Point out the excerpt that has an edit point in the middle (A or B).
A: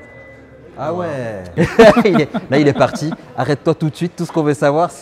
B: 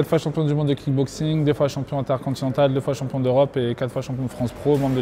A